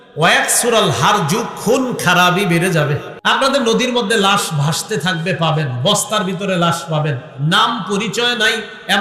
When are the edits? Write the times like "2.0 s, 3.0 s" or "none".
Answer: 3.4 s